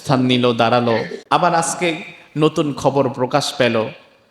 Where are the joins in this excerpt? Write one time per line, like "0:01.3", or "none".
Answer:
0:01.2